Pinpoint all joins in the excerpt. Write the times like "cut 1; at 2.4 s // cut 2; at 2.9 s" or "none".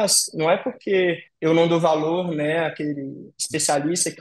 cut 1; at 1.3 s